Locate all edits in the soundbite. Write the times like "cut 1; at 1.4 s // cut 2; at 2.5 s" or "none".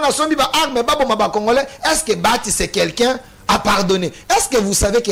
none